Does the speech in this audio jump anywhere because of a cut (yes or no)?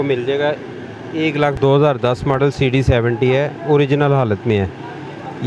yes